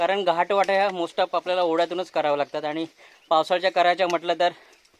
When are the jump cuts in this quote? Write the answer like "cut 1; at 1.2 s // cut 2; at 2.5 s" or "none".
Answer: none